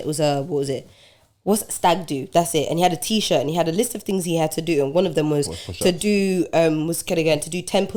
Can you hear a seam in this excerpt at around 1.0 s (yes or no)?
no